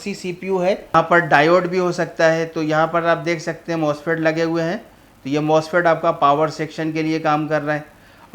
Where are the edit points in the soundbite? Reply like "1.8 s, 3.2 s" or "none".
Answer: 0.9 s